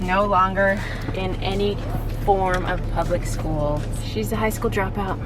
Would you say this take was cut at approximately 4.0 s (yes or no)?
yes